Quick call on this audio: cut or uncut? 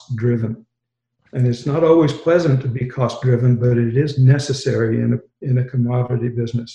cut